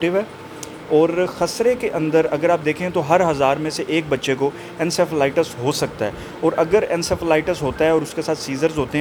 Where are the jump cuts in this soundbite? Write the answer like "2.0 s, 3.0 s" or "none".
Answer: none